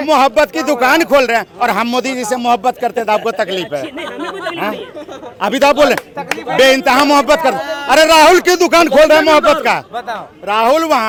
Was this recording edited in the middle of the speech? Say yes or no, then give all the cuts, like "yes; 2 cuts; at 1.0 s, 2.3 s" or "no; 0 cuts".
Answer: no; 0 cuts